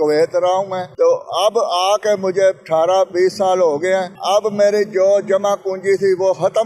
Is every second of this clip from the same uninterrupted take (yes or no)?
yes